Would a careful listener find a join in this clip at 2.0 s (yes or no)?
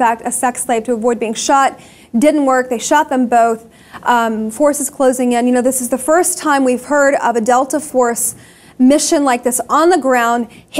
no